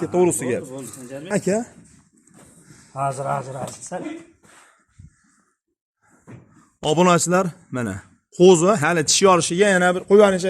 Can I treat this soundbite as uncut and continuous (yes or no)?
no